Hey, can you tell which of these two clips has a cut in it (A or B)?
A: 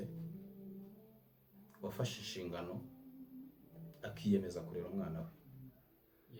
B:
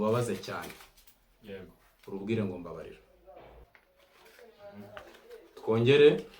B